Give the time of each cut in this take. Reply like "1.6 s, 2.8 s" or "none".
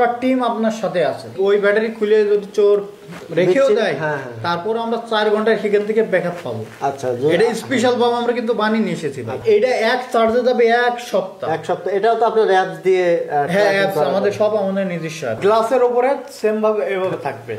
1.3 s, 9.3 s, 15.4 s